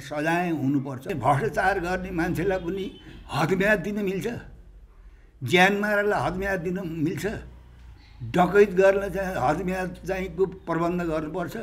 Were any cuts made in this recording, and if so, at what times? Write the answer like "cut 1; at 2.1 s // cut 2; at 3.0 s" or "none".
cut 1; at 1.1 s